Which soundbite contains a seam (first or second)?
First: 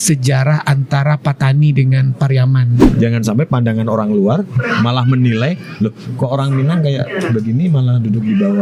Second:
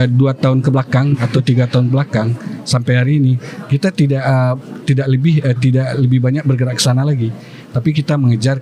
first